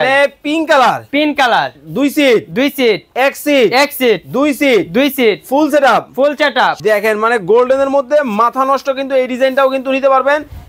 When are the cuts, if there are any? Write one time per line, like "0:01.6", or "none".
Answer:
0:06.8